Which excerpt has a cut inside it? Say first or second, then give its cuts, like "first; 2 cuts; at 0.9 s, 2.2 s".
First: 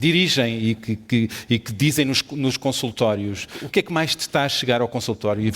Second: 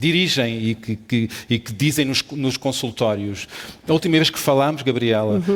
first; 1 cut; at 3.6 s